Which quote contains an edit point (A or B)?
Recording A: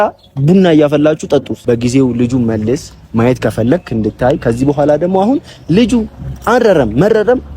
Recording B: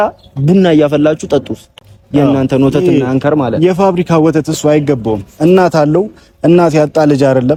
A